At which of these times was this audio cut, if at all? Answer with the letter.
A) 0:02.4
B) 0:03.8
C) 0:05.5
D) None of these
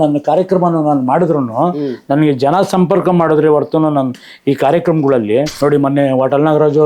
C